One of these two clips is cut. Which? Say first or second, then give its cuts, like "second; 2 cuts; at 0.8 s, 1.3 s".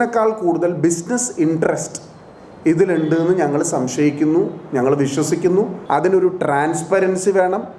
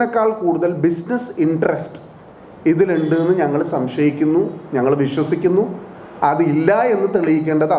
first; 1 cut; at 5.8 s